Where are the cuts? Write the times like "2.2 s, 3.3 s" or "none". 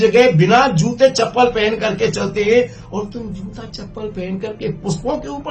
none